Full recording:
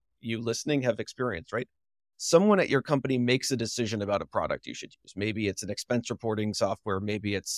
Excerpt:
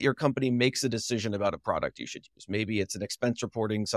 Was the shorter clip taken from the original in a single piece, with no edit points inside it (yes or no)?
yes